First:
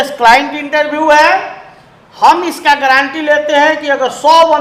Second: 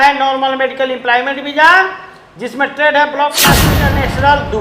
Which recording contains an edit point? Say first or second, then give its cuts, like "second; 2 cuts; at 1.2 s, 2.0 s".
second; 1 cut; at 3.7 s